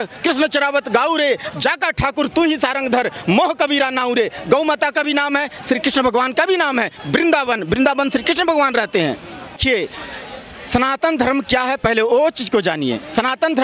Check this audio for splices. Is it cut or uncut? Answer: cut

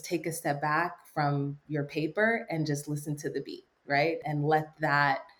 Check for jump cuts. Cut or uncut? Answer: uncut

